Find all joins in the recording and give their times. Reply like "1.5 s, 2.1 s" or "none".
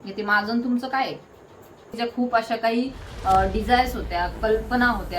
1.9 s